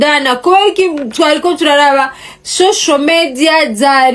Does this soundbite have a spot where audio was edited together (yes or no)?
no